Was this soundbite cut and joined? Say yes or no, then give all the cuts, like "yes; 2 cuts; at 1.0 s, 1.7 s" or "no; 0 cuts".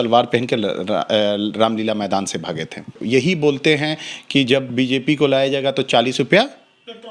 yes; 1 cut; at 2.9 s